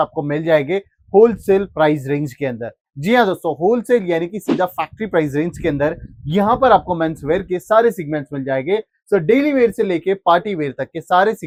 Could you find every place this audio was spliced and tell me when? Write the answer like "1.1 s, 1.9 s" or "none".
none